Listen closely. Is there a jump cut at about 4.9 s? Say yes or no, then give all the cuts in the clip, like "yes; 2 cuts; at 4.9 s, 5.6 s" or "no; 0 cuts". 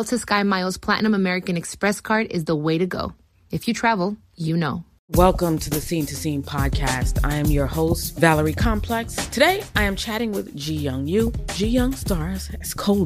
yes; 1 cut; at 4.9 s